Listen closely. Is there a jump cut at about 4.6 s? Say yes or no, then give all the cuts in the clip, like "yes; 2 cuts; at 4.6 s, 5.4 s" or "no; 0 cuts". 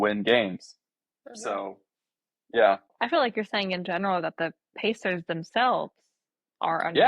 no; 1 cut; at 2.9 s